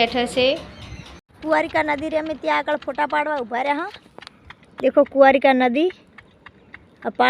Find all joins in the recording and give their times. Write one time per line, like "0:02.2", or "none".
0:01.3